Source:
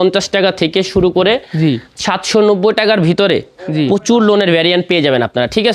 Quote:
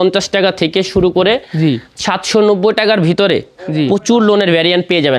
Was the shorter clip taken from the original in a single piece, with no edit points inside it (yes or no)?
yes